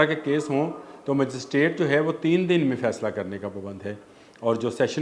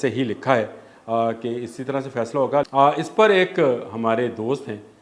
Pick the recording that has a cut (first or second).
second